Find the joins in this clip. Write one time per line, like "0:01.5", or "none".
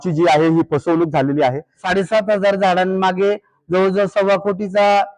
0:01.8